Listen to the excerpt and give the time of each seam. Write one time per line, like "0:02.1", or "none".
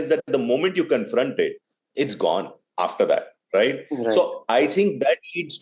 none